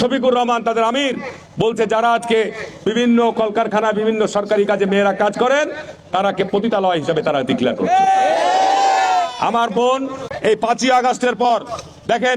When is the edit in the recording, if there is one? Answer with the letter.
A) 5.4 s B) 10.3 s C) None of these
B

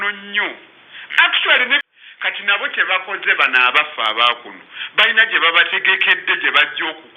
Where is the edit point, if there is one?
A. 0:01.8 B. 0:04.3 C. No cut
A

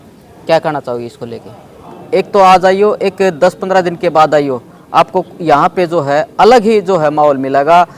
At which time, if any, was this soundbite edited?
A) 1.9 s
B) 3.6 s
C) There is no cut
A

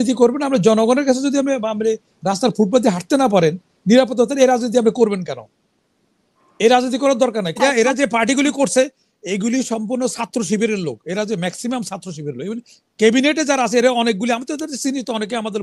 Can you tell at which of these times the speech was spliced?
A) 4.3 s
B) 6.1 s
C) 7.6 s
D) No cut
C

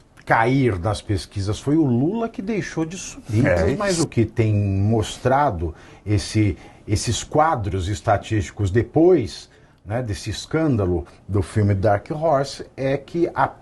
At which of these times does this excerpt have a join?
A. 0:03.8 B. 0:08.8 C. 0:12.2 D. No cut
A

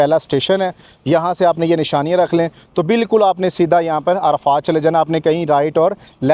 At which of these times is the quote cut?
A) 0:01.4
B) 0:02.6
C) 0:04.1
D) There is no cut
D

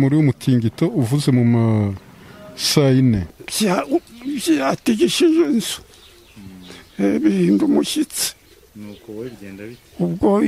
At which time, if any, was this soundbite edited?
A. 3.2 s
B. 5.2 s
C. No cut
A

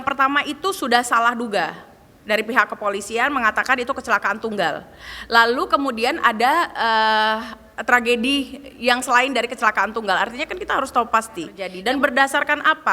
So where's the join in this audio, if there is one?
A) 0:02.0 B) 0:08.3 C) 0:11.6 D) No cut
C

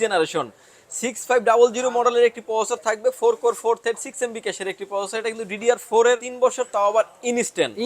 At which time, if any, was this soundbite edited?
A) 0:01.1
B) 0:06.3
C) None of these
B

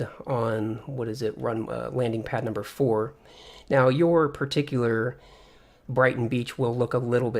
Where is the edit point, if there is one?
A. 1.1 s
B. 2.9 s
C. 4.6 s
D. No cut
A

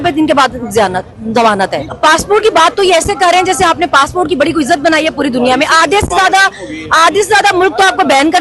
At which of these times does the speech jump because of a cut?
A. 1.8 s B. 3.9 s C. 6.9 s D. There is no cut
A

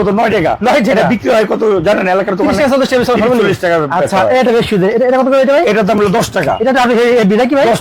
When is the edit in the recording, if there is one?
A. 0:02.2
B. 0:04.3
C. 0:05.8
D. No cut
D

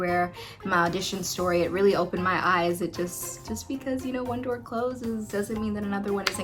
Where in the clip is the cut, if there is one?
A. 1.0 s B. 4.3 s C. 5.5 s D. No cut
D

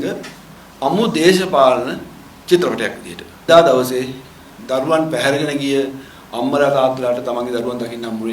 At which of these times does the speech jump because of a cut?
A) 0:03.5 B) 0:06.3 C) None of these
A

